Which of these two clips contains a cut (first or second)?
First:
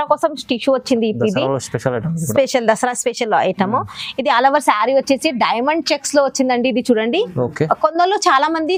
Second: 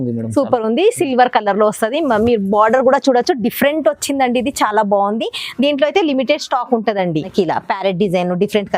second